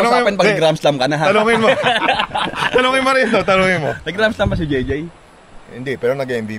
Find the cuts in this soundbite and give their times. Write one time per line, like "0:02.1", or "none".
none